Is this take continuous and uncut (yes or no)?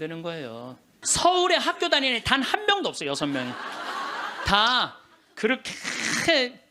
no